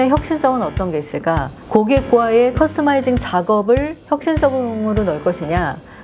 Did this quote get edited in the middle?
no; 0 cuts

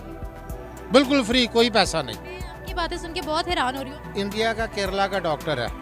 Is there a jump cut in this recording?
yes; 1 cut; at 3.9 s

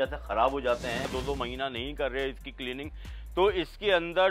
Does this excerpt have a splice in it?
yes; 1 cut; at 1.1 s

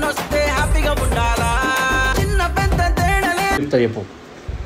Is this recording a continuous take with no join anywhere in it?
no; 1 cut; at 3.6 s

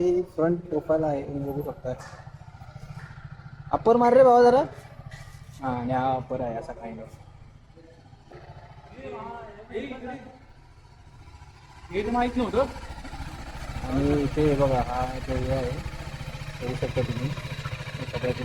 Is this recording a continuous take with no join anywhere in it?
no; 1 cut; at 8.3 s

